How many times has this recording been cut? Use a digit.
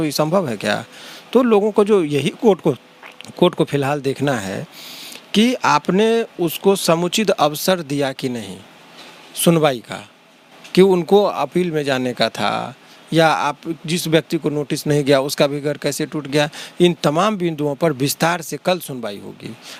0